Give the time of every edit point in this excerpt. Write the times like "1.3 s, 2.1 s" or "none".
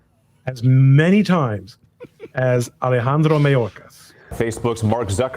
4.3 s